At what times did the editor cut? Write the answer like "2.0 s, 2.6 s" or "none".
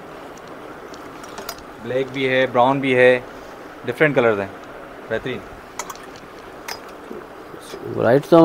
none